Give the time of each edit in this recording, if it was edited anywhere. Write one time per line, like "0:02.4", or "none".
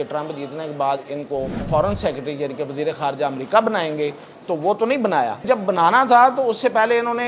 0:01.7
0:05.4